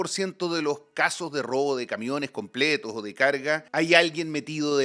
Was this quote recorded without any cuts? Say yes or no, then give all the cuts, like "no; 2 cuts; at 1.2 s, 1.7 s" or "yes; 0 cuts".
no; 1 cut; at 3.7 s